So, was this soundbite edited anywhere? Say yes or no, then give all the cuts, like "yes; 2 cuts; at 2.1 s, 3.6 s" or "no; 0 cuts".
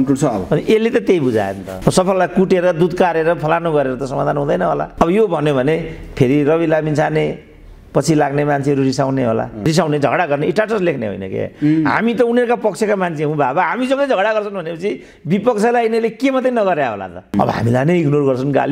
yes; 3 cuts; at 1.6 s, 9.6 s, 17.3 s